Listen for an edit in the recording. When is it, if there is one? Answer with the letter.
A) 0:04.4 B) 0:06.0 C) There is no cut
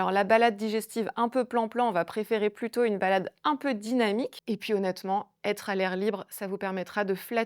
A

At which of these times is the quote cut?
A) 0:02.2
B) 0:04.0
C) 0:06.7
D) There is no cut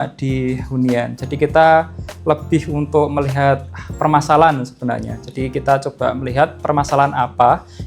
D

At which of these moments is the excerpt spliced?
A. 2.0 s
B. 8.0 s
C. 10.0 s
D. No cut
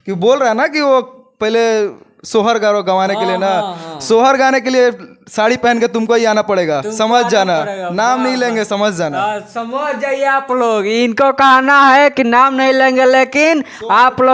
D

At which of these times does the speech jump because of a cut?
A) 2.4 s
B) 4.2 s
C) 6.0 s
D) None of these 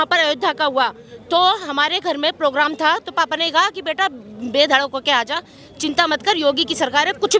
D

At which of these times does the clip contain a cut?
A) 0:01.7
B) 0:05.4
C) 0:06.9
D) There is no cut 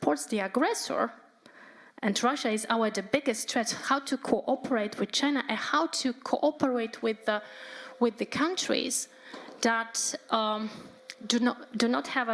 D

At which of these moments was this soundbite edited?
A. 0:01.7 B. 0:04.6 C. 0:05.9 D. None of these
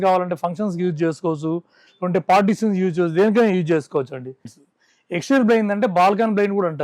B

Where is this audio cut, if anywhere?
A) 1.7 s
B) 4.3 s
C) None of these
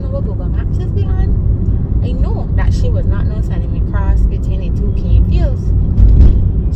C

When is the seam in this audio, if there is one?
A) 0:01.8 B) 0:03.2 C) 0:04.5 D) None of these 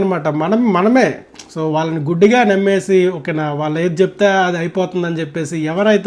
D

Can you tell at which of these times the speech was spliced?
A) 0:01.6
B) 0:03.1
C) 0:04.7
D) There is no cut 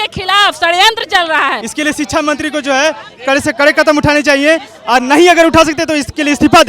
A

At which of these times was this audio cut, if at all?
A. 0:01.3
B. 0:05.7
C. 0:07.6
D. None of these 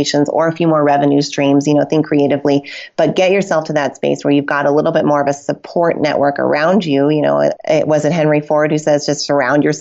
C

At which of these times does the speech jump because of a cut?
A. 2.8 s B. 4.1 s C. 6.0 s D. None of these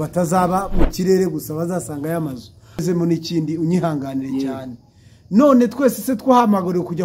A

